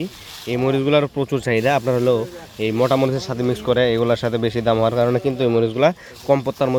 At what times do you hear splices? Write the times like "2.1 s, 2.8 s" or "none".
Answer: none